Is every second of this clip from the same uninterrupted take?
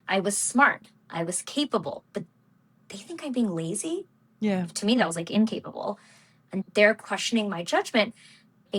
yes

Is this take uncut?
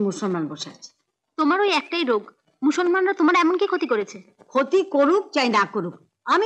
yes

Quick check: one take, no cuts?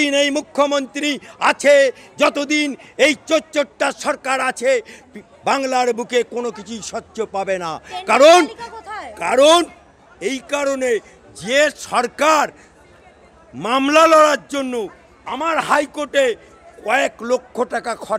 yes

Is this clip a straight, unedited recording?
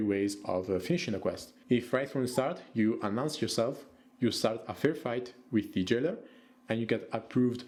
yes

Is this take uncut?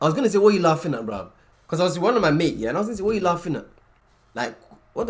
yes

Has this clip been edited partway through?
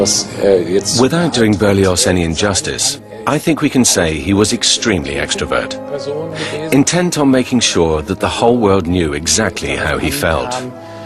yes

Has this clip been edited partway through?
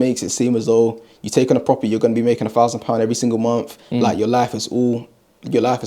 no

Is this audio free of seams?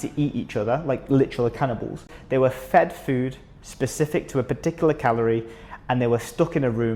no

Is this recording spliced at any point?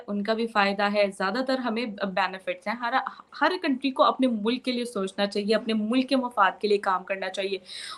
no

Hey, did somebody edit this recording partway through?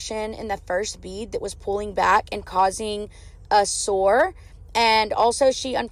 no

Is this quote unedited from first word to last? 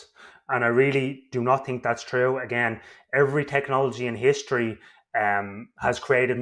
yes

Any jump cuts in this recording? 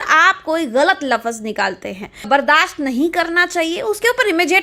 yes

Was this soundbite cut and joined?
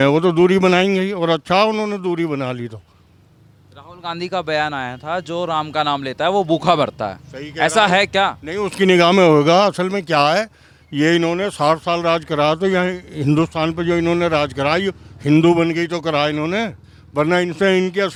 no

